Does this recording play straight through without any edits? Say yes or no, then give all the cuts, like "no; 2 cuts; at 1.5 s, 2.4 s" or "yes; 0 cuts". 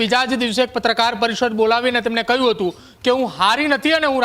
yes; 0 cuts